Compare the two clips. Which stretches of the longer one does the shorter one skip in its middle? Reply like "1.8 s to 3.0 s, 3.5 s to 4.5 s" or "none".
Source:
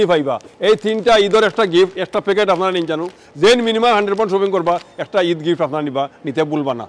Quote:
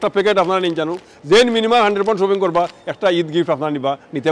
none